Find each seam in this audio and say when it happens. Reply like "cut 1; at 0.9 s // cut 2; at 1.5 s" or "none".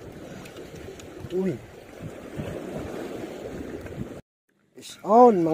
cut 1; at 4.2 s